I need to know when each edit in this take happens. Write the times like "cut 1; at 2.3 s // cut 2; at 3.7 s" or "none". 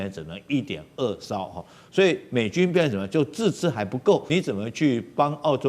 cut 1; at 4.3 s